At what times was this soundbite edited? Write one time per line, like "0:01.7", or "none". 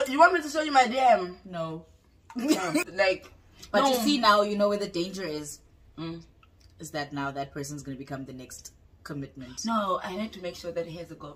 0:02.8